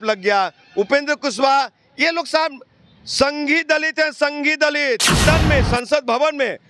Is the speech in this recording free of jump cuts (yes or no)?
no